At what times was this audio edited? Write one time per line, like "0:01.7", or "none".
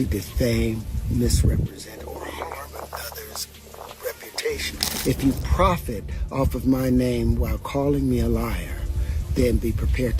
0:04.9